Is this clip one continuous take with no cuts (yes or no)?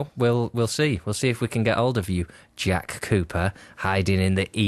yes